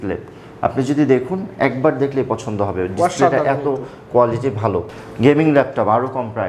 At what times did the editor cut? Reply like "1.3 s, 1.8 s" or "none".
5.0 s